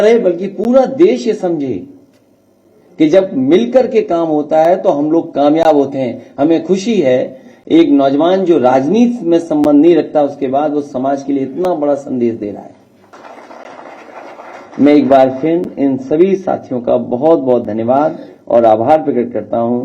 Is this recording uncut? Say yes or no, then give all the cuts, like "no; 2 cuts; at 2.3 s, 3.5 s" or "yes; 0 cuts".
no; 1 cut; at 13.1 s